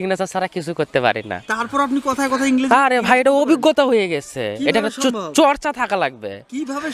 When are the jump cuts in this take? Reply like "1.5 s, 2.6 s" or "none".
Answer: none